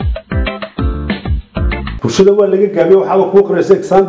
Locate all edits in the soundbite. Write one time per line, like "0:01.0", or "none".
0:01.7